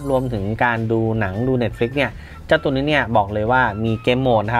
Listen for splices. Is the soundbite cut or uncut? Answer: uncut